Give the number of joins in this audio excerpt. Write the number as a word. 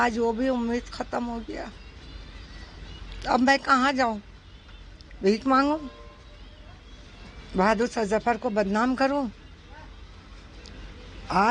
zero